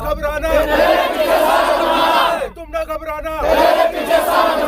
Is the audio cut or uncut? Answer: uncut